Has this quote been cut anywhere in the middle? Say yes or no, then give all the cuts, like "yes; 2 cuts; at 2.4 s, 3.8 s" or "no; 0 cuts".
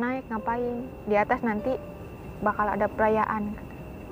no; 0 cuts